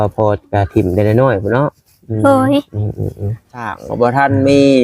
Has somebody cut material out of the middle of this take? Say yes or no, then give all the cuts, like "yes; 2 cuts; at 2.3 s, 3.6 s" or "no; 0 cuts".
yes; 1 cut; at 3.8 s